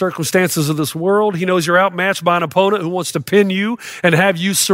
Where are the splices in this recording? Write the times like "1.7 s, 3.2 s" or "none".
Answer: none